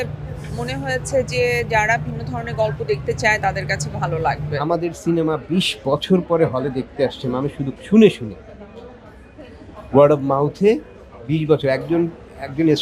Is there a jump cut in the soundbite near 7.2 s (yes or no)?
no